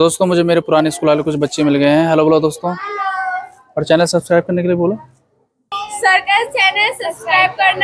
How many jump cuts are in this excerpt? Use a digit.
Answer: 0